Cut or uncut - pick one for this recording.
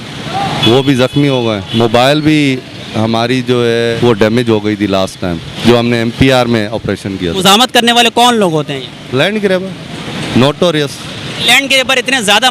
cut